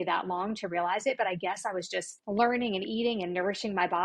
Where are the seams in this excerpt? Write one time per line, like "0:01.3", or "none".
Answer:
0:02.1